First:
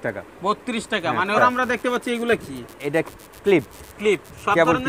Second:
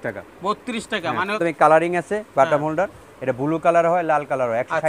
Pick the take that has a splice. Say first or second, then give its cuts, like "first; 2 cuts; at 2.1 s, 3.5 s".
second; 1 cut; at 1.4 s